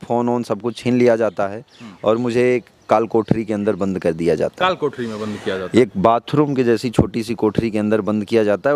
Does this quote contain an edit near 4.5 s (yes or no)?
no